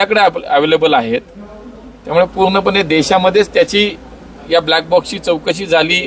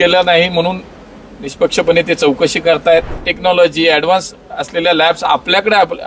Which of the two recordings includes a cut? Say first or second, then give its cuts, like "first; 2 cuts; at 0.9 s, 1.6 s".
second; 1 cut; at 3.2 s